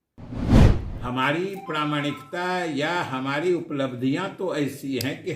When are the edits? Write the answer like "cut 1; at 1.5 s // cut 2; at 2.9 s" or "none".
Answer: cut 1; at 0.9 s